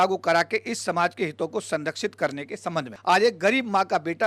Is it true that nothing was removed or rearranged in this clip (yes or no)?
no